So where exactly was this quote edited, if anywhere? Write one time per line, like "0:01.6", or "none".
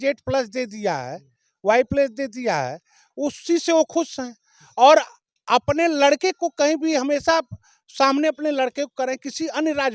none